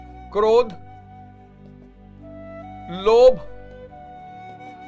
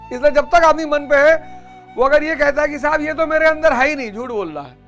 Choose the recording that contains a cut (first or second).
first